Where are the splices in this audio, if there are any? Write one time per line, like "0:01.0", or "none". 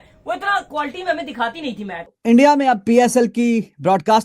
0:02.0